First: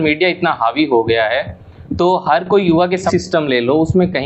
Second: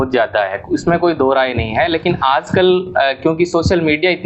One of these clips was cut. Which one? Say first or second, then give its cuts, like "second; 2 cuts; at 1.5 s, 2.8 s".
first; 1 cut; at 3.1 s